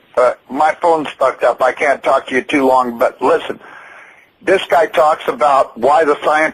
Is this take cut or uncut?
uncut